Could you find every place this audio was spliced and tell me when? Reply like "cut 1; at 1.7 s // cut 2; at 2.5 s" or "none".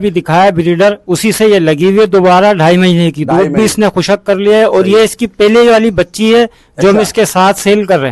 none